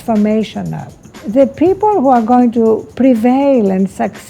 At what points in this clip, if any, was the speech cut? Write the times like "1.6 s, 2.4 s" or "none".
1.2 s, 2.9 s